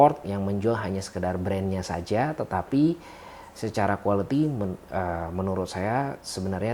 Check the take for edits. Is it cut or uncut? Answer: uncut